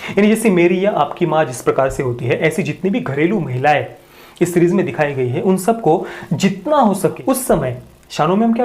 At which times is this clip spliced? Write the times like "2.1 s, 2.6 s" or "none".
7.2 s